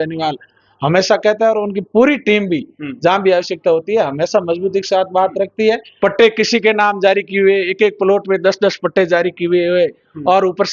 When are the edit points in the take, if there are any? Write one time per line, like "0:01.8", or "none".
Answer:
0:05.9